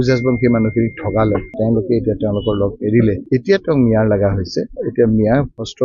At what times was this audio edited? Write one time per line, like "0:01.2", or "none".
none